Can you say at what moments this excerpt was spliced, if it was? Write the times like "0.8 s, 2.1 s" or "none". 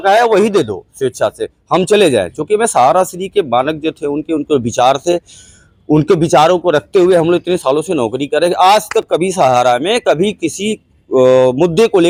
none